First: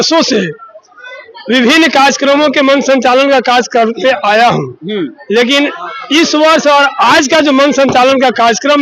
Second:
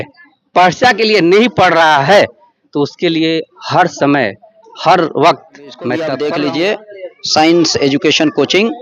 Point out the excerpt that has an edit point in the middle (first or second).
second